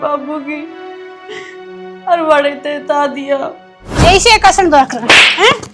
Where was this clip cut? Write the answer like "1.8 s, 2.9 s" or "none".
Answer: 3.8 s